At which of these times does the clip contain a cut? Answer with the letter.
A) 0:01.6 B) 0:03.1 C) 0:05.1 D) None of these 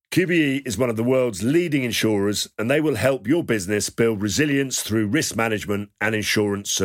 D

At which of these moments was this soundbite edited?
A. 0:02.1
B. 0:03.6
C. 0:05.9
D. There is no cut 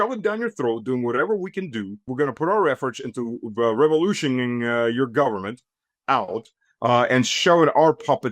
A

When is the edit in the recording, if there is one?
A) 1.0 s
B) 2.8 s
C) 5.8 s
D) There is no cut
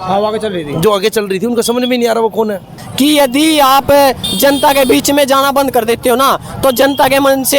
B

